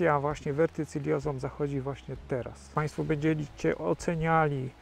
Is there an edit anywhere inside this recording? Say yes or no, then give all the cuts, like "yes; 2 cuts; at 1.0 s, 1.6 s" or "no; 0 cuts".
yes; 1 cut; at 2.7 s